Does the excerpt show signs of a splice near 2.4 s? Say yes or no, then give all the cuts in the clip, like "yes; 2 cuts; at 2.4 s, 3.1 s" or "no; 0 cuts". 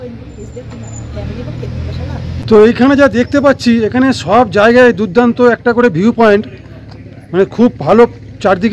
yes; 1 cut; at 2.4 s